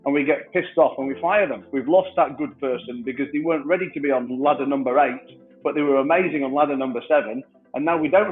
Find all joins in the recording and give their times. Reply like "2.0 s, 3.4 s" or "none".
1.6 s, 4.3 s

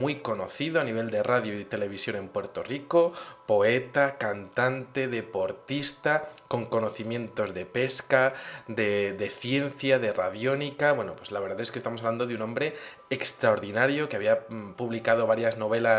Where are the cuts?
12.9 s

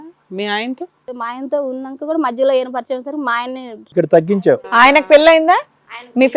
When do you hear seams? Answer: 1.1 s, 3.7 s

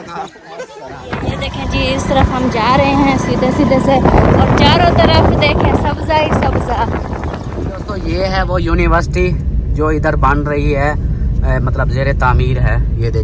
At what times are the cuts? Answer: 1.1 s, 8.0 s

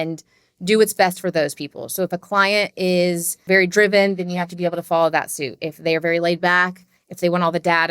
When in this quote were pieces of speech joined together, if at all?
3.4 s

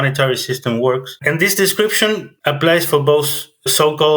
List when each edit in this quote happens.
1.1 s

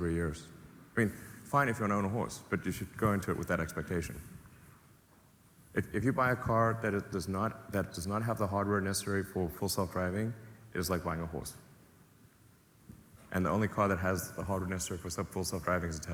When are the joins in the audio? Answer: none

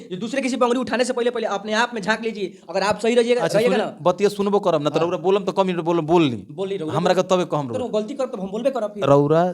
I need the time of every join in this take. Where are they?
none

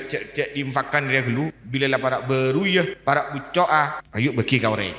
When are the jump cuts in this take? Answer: 1.6 s, 2.9 s, 4.0 s

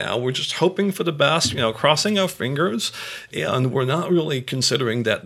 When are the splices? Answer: none

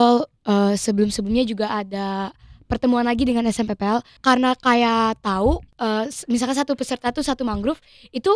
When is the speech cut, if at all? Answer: 4.1 s, 5.7 s

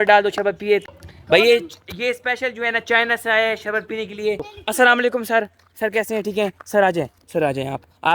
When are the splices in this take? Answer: 4.5 s

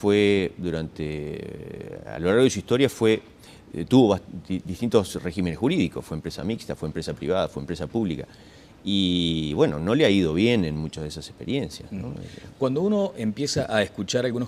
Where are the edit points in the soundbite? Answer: 8.7 s

